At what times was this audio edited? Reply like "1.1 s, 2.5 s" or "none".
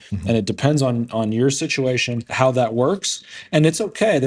2.3 s